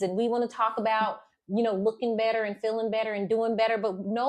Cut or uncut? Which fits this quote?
uncut